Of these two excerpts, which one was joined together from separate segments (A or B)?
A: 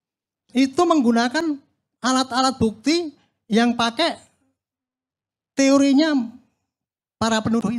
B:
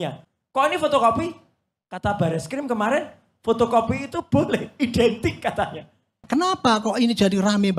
B